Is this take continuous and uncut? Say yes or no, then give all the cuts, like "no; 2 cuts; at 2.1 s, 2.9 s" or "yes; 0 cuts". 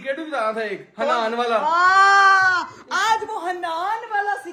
yes; 0 cuts